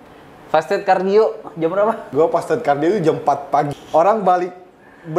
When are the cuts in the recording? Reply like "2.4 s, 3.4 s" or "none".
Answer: 2.0 s, 3.8 s

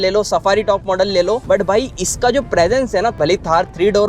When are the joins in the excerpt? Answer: 1.4 s, 3.2 s

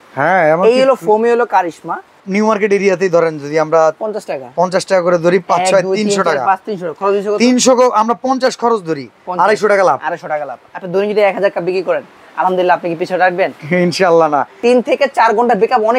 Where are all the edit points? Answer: 2.2 s, 14.5 s

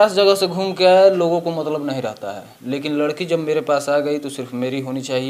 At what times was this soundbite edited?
none

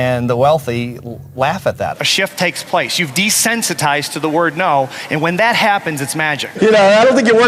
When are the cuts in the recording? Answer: 1.9 s, 6.6 s

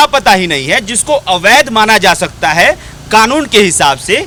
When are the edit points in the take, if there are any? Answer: none

